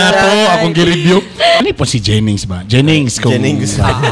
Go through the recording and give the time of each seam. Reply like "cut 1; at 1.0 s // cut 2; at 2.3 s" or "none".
cut 1; at 1.6 s